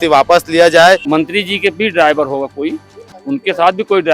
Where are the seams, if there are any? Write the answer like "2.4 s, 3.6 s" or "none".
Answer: 1.0 s

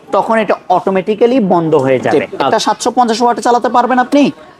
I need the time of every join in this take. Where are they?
2.4 s

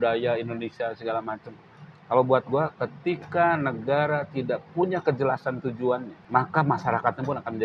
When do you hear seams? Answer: 6.1 s

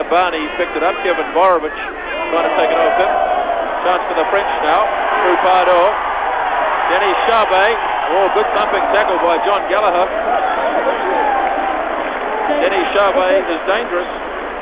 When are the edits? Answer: 3.1 s

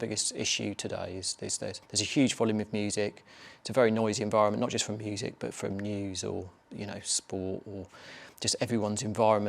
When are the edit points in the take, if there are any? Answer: 1.8 s

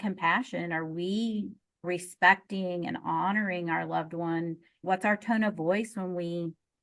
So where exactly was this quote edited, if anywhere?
4.7 s

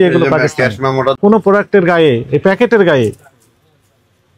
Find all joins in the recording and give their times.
1.2 s

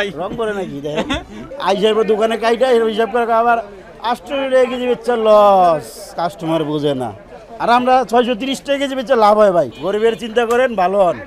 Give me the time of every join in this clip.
1.4 s, 9.8 s

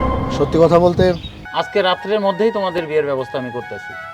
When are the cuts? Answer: 1.3 s

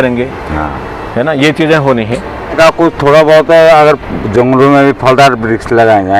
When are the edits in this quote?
2.5 s

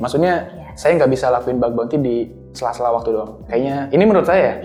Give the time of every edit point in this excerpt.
none

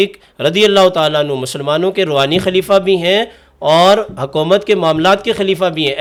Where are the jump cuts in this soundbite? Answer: none

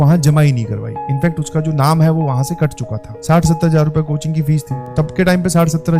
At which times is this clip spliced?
3.1 s, 4.9 s

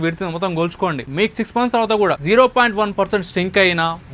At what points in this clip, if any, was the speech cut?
1.0 s, 2.2 s

